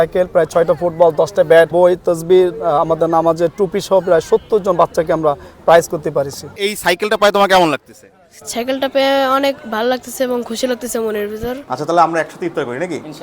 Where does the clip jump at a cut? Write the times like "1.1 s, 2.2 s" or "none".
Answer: 1.7 s, 6.5 s, 11.6 s